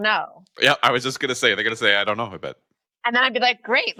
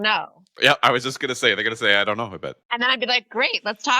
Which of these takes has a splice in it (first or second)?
second